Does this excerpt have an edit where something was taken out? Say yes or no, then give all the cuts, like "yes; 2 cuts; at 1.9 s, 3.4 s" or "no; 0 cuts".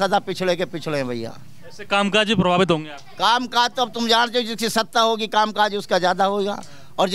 no; 0 cuts